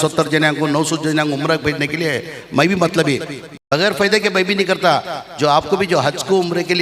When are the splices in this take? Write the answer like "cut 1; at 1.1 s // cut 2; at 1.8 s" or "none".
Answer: cut 1; at 3.5 s